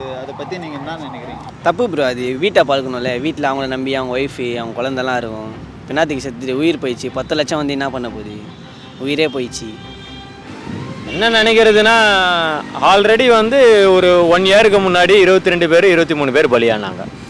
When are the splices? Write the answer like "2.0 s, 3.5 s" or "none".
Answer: 1.4 s